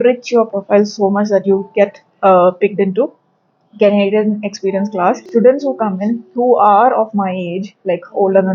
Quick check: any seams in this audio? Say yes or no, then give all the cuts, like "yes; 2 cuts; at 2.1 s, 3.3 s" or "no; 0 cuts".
yes; 1 cut; at 5.2 s